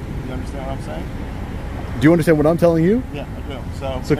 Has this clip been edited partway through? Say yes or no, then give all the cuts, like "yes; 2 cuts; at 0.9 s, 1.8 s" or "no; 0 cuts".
no; 0 cuts